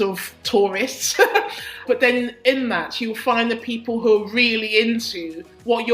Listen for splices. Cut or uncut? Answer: cut